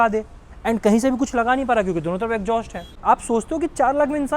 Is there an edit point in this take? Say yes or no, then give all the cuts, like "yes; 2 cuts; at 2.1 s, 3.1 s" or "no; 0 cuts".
yes; 1 cut; at 2.9 s